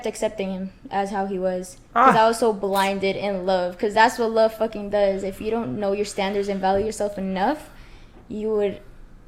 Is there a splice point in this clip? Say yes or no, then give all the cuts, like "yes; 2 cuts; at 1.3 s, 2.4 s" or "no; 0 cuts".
no; 0 cuts